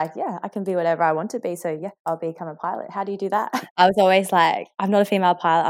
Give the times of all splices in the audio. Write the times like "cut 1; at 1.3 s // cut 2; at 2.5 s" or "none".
cut 1; at 1.9 s // cut 2; at 3.5 s